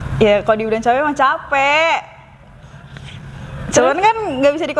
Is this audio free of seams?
yes; 0 cuts

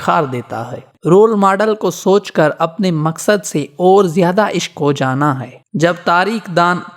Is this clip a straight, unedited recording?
no; 2 cuts; at 0.9 s, 5.6 s

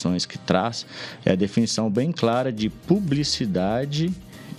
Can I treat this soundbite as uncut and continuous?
yes; 0 cuts

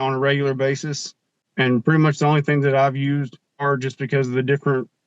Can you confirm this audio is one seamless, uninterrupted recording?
no; 2 cuts; at 1.4 s, 3.6 s

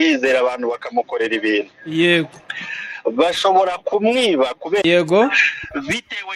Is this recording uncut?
no; 1 cut; at 4.8 s

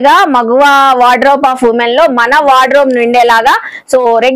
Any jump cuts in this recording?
no; 0 cuts

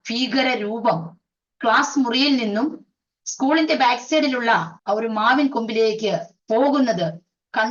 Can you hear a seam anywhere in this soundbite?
yes; 2 cuts; at 4.7 s, 6.3 s

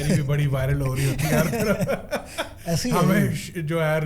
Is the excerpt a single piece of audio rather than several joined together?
yes; 0 cuts

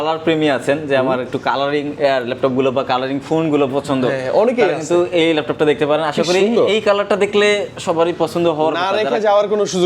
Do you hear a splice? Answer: no; 0 cuts

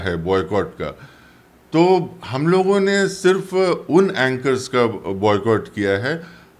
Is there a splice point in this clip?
no; 0 cuts

